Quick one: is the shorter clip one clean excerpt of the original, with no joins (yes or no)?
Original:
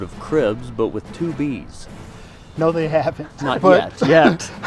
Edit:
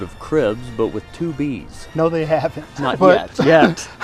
no